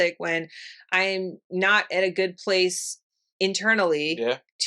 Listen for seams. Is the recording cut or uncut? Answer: uncut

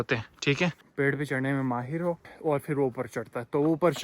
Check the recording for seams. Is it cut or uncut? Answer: cut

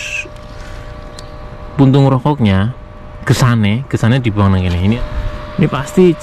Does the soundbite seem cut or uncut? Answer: cut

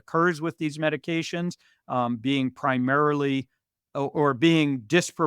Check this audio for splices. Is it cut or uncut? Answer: uncut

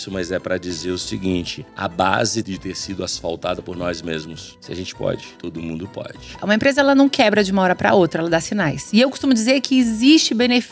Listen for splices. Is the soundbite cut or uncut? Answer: cut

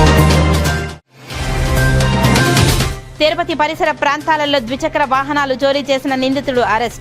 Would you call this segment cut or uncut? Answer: uncut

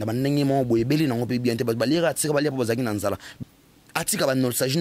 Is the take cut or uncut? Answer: cut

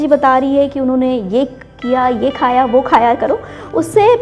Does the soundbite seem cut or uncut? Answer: uncut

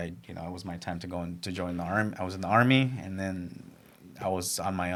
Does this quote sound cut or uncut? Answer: uncut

